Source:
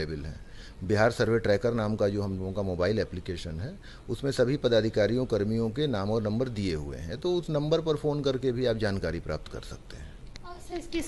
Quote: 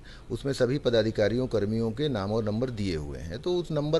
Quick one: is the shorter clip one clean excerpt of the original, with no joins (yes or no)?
yes